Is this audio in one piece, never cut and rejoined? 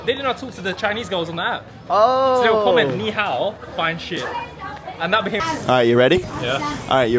no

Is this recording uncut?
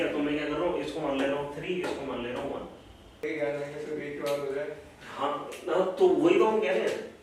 no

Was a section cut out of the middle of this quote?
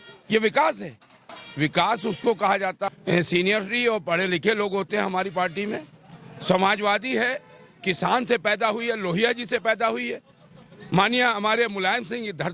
yes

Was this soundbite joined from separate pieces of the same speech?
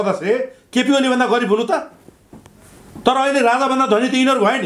no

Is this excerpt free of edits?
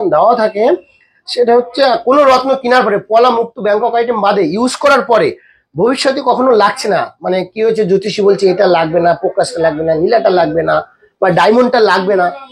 yes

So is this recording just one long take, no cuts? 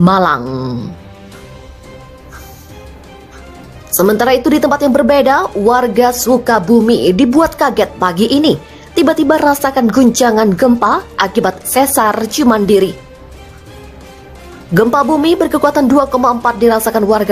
no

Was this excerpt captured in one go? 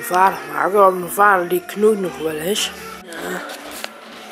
no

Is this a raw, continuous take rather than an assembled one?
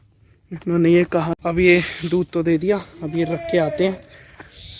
no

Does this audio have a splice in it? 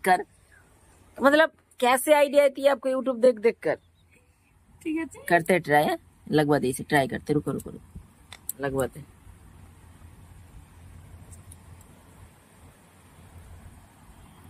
no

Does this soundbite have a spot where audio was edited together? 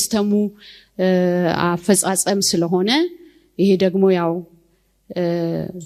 no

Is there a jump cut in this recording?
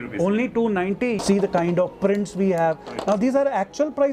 yes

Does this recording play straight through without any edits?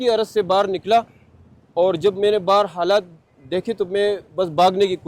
yes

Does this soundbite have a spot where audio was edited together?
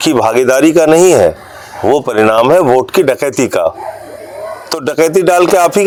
no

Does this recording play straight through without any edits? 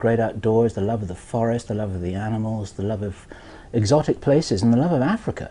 no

